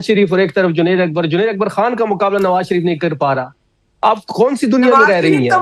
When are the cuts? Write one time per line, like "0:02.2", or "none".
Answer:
none

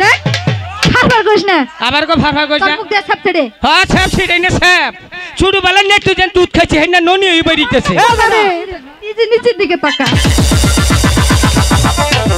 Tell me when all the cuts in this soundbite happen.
0:08.2

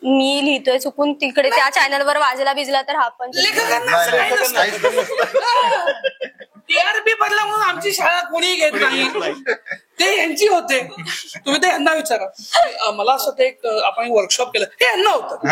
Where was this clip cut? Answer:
none

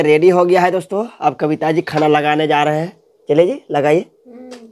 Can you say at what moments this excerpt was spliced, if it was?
none

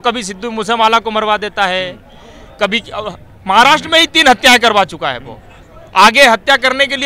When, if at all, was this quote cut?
none

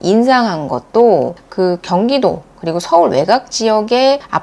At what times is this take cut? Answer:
none

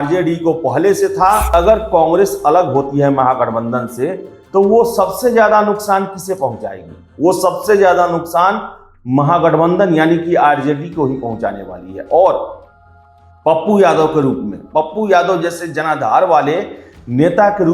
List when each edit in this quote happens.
0:01.5

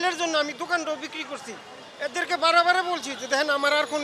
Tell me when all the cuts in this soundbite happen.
none

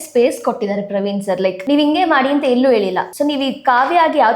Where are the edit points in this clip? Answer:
0:01.6
0:03.1

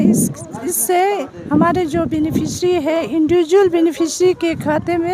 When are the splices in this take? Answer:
none

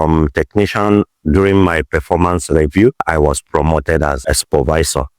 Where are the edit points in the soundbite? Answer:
0:01.1
0:03.0
0:04.2

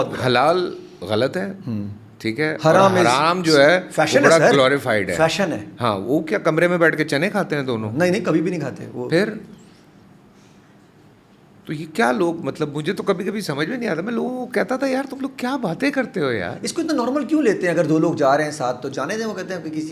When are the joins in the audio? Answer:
none

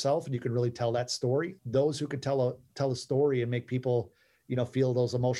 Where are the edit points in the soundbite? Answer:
none

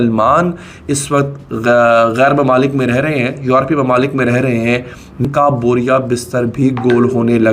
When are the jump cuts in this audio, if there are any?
0:05.2

